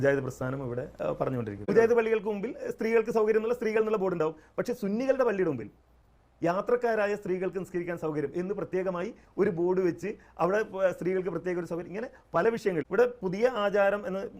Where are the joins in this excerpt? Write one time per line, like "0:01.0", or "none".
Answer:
0:01.7
0:12.9

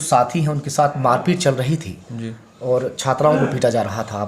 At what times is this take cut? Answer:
none

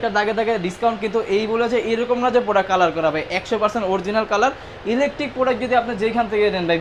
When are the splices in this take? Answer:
none

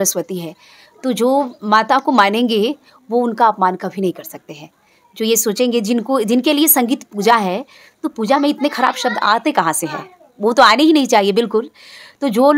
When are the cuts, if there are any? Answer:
none

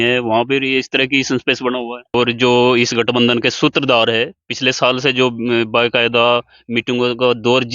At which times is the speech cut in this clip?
0:02.1

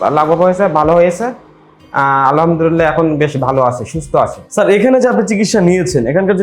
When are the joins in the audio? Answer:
0:04.4

